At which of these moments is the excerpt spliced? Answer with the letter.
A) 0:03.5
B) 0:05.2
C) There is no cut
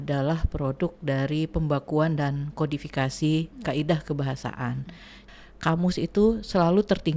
B